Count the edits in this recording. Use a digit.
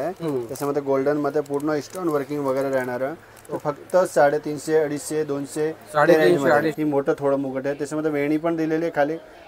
1